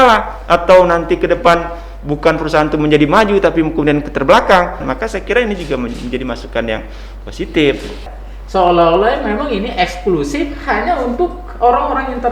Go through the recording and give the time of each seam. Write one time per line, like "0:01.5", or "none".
0:04.8
0:08.0